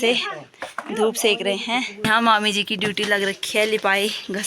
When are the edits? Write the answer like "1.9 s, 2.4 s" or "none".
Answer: 2.0 s